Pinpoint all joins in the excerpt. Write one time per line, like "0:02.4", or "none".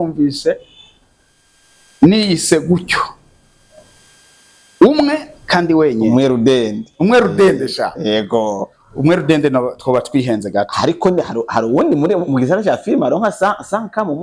none